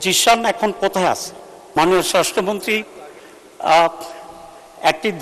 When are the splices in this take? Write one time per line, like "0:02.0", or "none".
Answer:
0:01.7

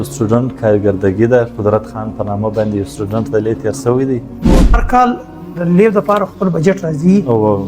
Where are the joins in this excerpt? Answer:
0:04.4

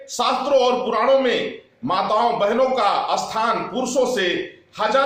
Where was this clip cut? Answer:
none

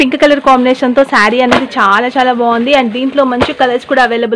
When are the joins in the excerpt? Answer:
none

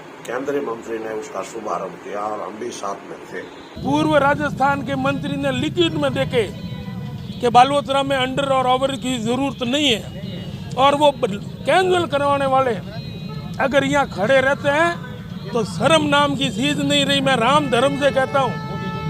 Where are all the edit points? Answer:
0:03.8

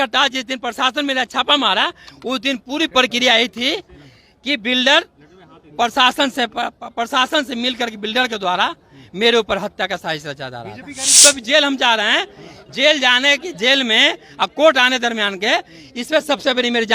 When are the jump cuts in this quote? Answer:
0:11.2

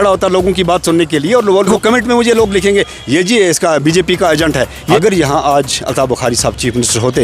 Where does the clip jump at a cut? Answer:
0:01.7
0:04.8

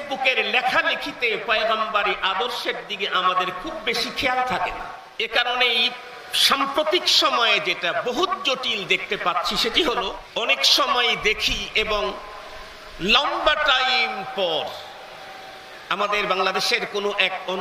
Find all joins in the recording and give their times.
0:05.0
0:10.2

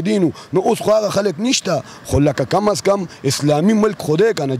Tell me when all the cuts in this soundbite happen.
none

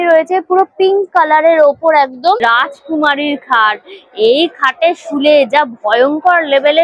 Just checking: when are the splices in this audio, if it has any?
0:02.4

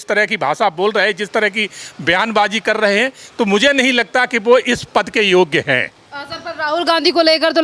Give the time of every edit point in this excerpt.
none

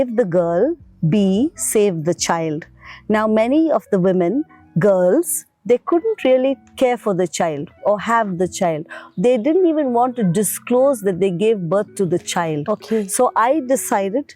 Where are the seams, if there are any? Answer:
none

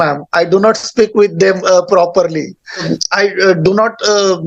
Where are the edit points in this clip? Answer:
0:02.9

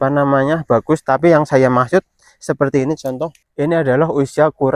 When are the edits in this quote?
0:03.4

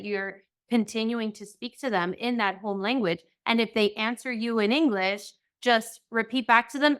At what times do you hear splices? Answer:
none

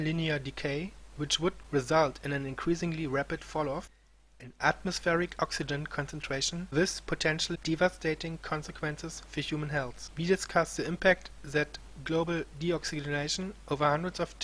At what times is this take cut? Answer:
0:11.0

